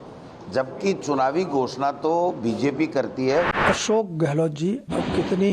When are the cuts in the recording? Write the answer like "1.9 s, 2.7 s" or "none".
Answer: 3.6 s